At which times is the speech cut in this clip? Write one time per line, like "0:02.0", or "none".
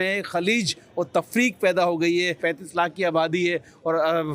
0:02.4